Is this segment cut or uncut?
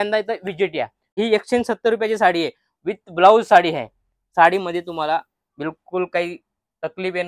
cut